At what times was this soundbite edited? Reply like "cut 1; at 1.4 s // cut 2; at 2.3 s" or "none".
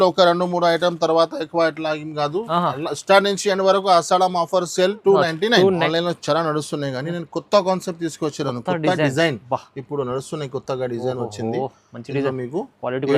cut 1; at 5.8 s

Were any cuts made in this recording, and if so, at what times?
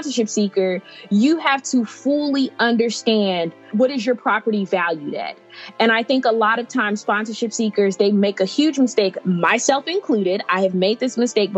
cut 1; at 3.7 s

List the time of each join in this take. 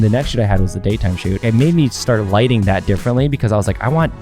cut 1; at 1.4 s

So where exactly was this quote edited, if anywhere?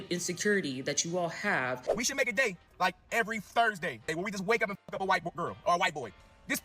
cut 1; at 1.8 s // cut 2; at 4.1 s

